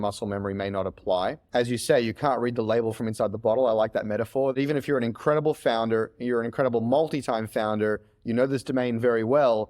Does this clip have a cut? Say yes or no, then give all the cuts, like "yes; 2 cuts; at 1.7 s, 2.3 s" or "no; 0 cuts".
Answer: yes; 2 cuts; at 1.4 s, 4.6 s